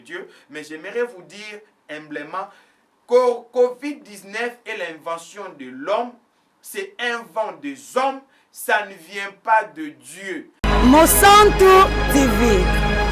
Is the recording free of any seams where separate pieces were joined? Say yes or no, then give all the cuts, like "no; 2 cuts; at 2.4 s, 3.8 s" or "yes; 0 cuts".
no; 1 cut; at 10.4 s